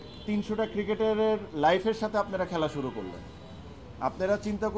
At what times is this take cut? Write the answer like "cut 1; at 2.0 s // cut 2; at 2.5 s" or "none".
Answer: none

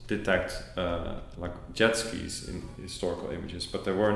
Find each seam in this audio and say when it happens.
none

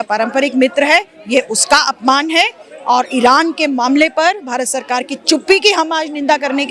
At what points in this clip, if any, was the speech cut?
none

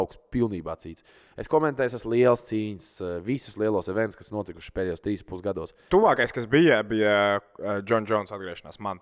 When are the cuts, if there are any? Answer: cut 1; at 5.9 s

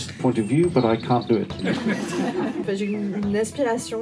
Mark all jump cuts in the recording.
cut 1; at 1.6 s // cut 2; at 2.7 s

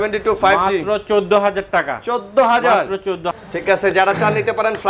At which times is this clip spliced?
cut 1; at 3.3 s

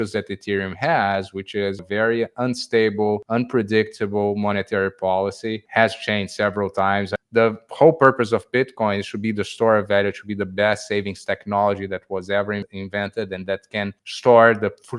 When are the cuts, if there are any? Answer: cut 1; at 1.8 s // cut 2; at 3.2 s // cut 3; at 5.6 s // cut 4; at 7.1 s // cut 5; at 12.6 s // cut 6; at 14.0 s

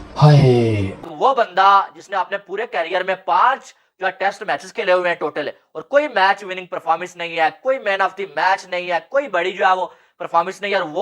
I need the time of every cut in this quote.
cut 1; at 0.9 s

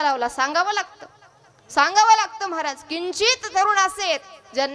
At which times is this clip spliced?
none

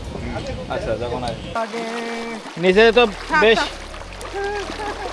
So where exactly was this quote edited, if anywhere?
cut 1; at 1.6 s

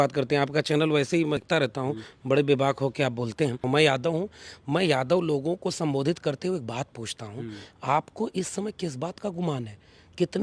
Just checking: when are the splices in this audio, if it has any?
cut 1; at 1.4 s // cut 2; at 3.6 s

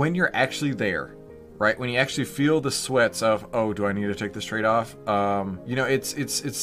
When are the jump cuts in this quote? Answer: cut 1; at 5.6 s

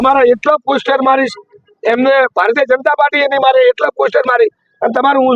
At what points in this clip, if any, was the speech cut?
none

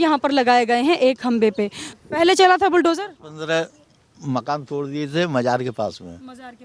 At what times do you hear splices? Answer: cut 1; at 1.8 s

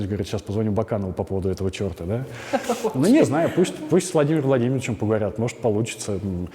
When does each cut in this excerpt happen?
none

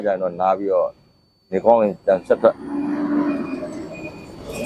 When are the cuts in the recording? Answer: none

